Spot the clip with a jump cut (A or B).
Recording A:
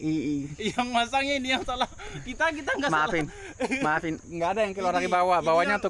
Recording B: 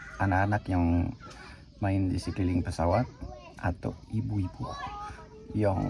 A